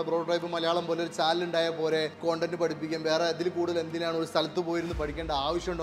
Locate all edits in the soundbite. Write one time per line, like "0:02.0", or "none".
0:02.1